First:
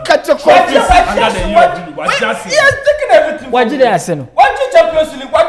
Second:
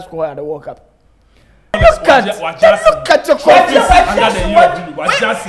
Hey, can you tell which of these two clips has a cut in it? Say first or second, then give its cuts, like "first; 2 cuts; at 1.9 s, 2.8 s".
second; 1 cut; at 1.8 s